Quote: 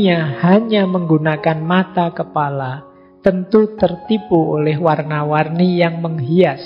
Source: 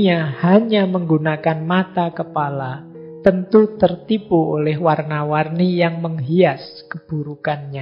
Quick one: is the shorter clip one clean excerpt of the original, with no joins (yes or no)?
yes